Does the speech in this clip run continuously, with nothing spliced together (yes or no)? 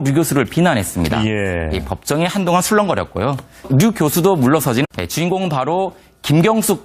yes